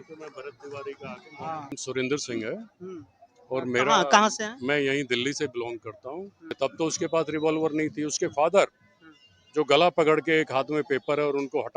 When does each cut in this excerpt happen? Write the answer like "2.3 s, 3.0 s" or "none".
1.8 s, 6.6 s